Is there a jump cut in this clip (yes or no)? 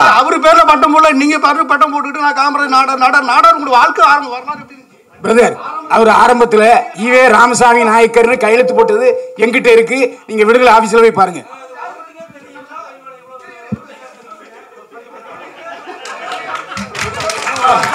no